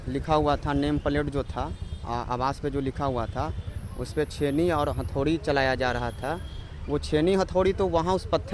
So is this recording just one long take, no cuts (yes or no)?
yes